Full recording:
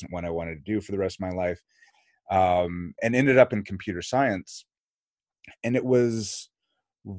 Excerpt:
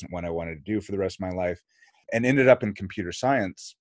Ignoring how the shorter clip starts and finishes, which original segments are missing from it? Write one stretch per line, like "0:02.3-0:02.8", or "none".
0:01.9-0:02.8